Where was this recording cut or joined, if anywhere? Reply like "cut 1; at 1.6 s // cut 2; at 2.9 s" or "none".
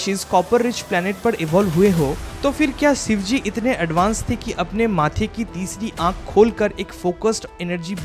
cut 1; at 2.3 s